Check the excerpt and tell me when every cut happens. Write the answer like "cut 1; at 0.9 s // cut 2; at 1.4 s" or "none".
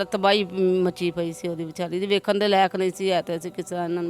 none